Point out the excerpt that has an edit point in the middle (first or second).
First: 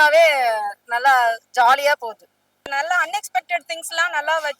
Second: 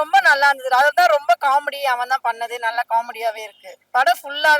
first